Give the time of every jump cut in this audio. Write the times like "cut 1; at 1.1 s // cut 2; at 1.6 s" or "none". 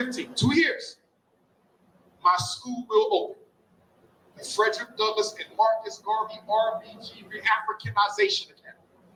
none